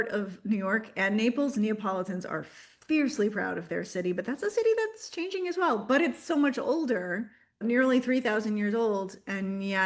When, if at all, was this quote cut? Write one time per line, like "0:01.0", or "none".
none